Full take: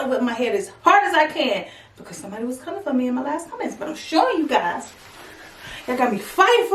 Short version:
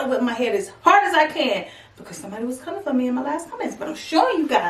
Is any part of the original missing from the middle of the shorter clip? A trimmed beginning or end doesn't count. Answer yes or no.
no